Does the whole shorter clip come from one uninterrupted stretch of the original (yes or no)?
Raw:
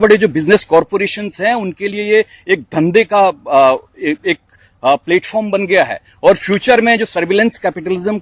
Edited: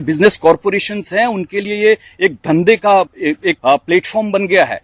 no